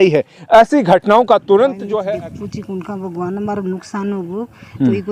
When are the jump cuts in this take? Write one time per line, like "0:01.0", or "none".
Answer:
0:02.0